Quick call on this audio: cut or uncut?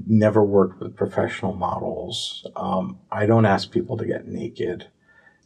uncut